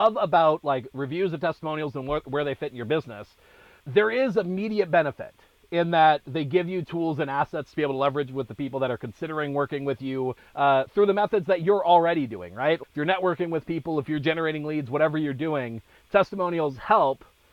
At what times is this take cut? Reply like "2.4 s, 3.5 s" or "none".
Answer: 10.4 s